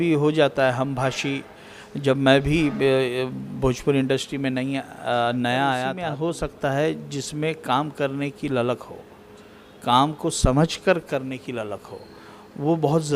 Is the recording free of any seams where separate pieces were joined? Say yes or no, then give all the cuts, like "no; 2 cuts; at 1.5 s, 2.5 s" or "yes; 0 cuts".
no; 1 cut; at 6.0 s